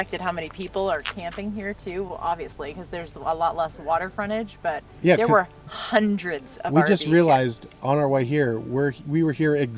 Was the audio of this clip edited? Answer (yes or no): no